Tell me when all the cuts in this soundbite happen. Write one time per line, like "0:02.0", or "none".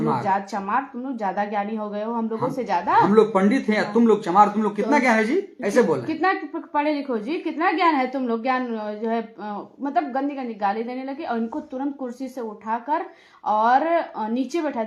none